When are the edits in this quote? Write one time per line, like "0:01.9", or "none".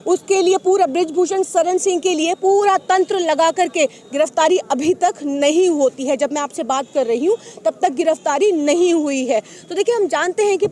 none